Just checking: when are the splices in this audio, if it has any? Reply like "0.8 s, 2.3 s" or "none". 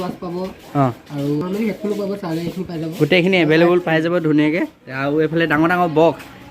1.4 s